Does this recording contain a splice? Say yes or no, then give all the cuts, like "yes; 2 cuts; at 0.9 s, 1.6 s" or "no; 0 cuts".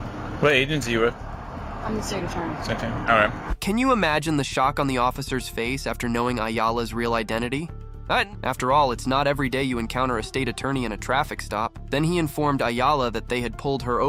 no; 0 cuts